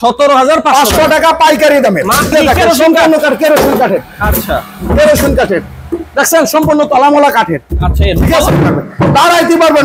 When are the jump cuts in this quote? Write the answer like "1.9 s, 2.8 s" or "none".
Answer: 2.3 s, 8.5 s